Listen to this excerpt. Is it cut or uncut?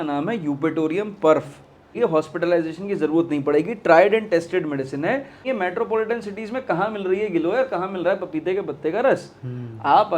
cut